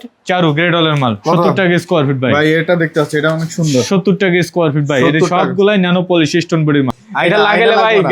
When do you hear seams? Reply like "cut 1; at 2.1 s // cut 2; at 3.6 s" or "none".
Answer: cut 1; at 7.0 s